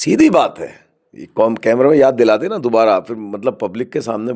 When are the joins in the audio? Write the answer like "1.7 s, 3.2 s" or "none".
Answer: none